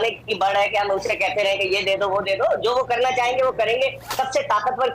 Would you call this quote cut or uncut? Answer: uncut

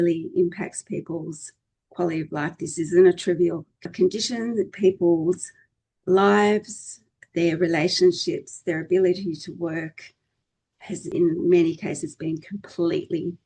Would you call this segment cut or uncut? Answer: cut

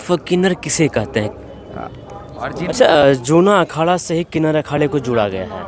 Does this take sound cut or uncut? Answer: cut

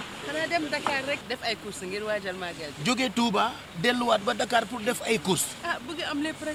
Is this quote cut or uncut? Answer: uncut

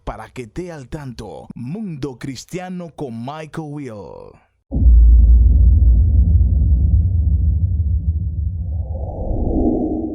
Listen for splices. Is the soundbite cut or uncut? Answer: cut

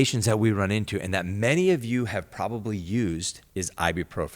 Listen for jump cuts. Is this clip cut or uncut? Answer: cut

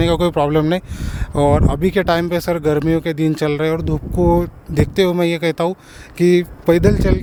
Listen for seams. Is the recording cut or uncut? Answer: uncut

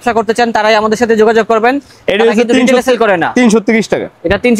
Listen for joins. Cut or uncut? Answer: uncut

